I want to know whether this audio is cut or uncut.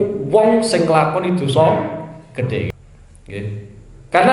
cut